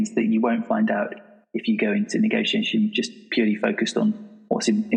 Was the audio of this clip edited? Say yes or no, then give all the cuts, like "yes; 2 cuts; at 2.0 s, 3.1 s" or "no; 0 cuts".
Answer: no; 0 cuts